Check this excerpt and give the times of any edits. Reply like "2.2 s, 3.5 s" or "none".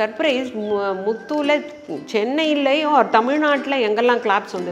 none